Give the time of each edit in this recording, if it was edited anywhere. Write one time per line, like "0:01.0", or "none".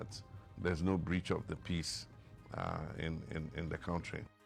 none